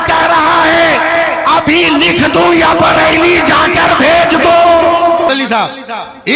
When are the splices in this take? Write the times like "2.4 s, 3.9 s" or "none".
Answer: 5.3 s